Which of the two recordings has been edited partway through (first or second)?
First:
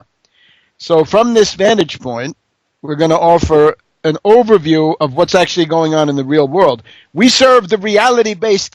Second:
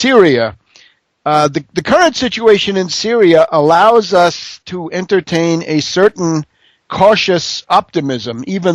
first